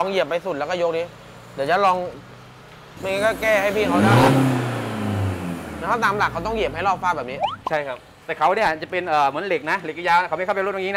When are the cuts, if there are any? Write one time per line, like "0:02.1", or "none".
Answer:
none